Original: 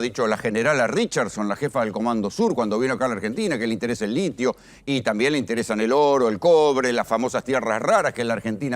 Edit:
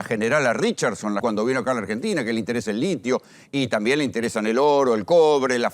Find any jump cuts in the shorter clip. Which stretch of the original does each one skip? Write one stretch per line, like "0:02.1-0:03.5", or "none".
0:01.6-0:02.6